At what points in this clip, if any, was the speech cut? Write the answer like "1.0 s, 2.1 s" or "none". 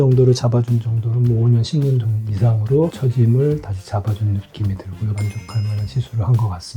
5.2 s